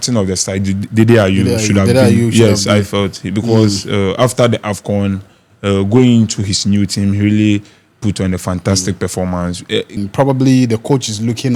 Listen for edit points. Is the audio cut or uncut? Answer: cut